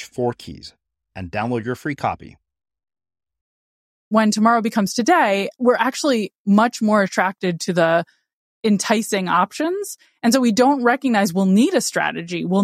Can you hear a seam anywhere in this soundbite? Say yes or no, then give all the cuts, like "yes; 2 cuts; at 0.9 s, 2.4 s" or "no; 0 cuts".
yes; 2 cuts; at 4.1 s, 5.5 s